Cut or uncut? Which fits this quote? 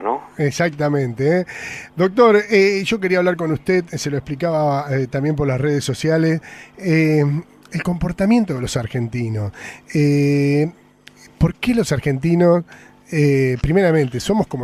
uncut